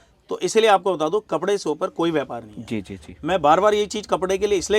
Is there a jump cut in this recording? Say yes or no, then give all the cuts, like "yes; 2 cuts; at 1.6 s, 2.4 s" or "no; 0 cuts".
no; 0 cuts